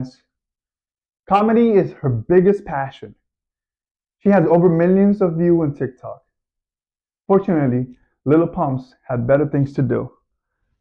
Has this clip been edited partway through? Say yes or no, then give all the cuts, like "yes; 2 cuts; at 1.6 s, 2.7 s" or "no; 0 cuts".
no; 0 cuts